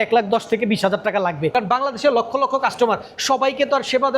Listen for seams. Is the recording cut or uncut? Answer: cut